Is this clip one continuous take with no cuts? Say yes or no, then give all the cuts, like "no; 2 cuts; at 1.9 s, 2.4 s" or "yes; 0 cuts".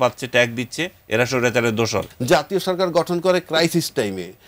no; 1 cut; at 2.1 s